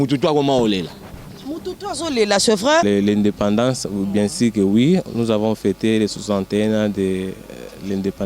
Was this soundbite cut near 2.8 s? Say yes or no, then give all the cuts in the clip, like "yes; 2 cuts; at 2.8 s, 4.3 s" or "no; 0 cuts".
yes; 1 cut; at 2.8 s